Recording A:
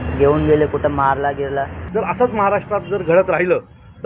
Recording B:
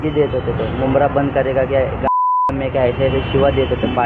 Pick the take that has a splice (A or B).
A